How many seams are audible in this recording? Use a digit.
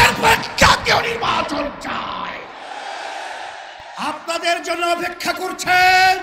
1